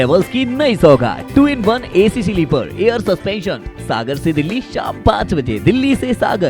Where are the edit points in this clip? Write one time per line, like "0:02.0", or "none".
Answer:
none